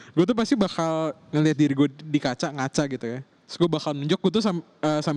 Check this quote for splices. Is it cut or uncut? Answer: uncut